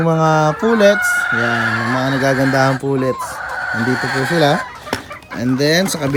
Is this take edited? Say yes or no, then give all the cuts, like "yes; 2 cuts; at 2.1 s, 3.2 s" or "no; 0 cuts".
no; 0 cuts